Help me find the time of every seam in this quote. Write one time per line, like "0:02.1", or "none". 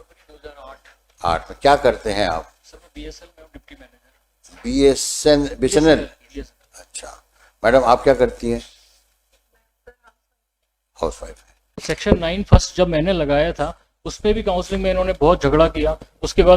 0:11.8